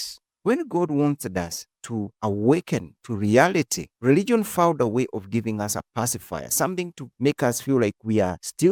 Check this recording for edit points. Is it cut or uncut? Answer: uncut